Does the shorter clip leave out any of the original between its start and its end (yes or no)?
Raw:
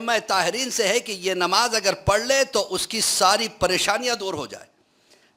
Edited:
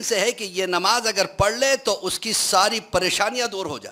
no